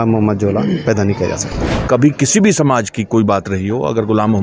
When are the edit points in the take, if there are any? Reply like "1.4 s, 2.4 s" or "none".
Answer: 1.6 s